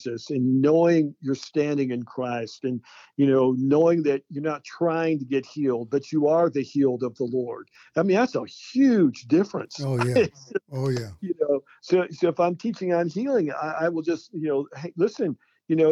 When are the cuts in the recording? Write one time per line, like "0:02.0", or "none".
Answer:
none